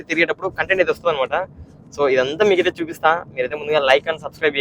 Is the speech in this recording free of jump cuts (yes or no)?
yes